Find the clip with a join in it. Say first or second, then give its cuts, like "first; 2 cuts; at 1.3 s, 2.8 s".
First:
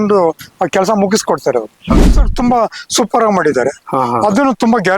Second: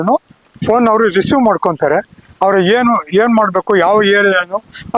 first; 1 cut; at 1.9 s